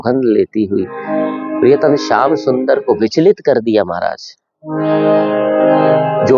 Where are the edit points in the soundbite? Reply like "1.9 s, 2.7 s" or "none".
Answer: none